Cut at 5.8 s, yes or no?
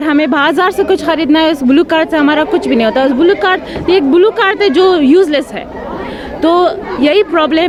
no